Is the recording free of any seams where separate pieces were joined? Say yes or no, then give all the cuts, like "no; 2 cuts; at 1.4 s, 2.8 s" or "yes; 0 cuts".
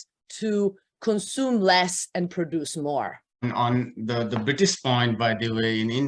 no; 1 cut; at 3.4 s